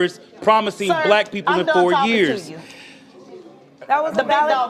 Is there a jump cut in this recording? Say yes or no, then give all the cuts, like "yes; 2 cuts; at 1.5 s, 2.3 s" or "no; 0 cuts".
no; 0 cuts